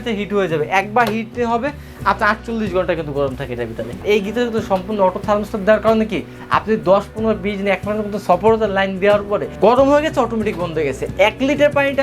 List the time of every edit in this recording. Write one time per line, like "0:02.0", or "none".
0:04.0
0:09.5